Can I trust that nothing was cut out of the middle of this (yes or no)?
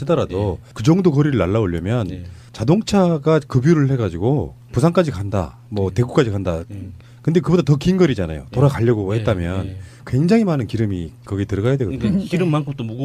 yes